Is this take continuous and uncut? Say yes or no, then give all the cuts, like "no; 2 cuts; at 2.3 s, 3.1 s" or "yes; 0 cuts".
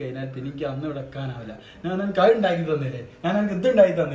yes; 0 cuts